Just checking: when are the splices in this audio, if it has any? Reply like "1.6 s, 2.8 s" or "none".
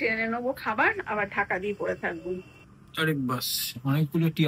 2.5 s